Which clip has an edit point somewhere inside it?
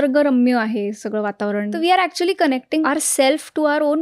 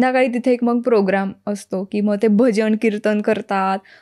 first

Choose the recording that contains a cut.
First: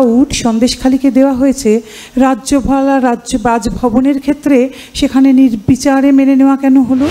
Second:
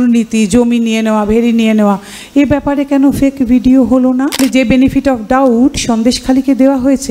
second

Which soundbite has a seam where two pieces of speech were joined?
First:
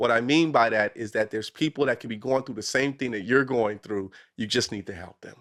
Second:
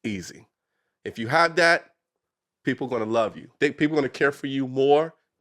second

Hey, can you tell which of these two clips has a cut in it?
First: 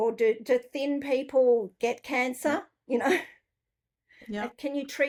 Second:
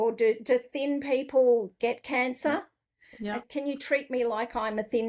second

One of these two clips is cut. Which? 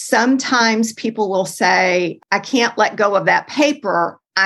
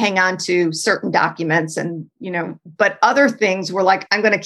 first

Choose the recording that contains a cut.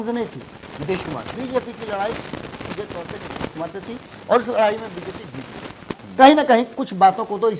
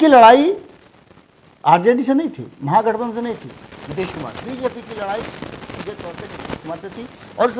first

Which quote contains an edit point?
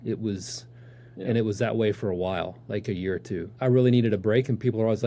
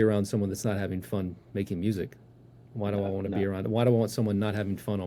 first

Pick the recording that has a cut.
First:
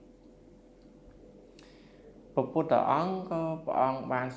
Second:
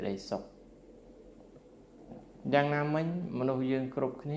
second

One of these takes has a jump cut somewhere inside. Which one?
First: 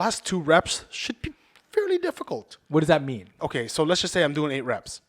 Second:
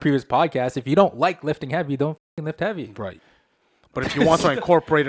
first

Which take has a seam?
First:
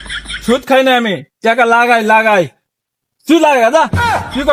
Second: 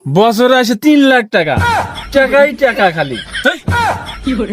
second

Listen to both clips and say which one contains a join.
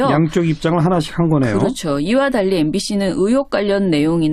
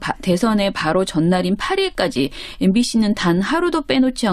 first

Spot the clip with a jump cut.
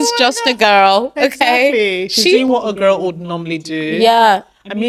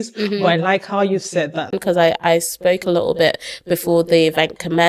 second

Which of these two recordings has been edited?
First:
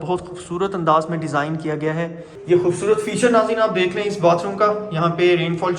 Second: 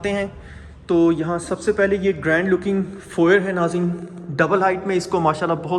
first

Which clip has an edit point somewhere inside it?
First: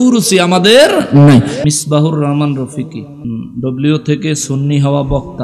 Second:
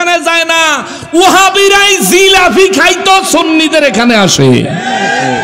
first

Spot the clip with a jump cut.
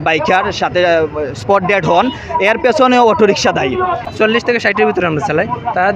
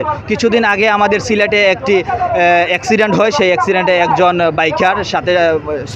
first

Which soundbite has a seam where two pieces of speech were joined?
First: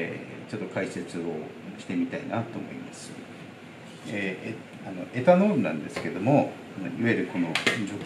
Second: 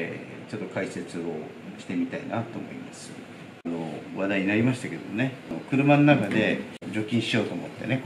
second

